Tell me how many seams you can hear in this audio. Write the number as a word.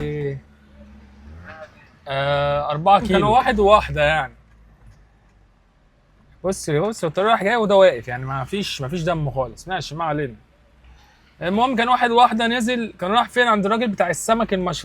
one